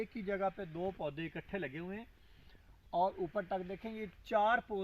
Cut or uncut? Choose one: uncut